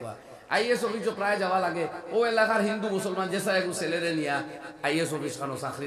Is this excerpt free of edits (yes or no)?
yes